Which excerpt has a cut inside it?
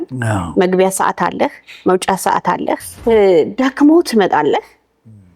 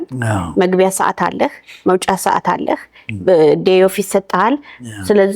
first; 1 cut; at 2.9 s

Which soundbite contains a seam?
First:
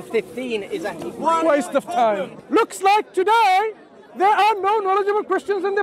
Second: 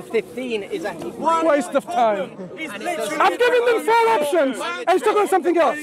first; 1 cut; at 2.3 s

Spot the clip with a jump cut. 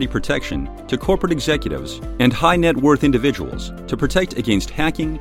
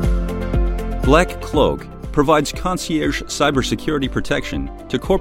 second; 1 cut; at 1.0 s

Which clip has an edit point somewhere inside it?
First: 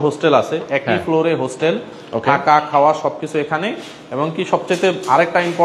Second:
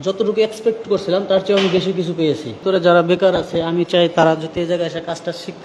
second; 1 cut; at 2.5 s

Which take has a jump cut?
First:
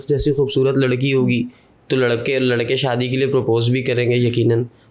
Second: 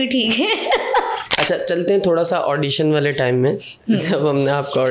second; 1 cut; at 1.3 s

